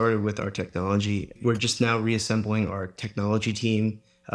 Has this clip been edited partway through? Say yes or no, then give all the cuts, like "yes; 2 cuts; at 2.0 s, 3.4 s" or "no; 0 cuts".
yes; 1 cut; at 1.3 s